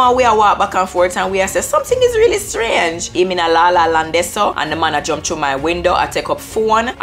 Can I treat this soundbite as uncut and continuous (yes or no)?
no